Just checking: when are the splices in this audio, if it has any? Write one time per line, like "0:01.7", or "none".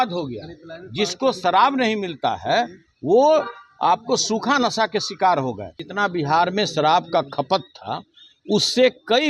0:05.8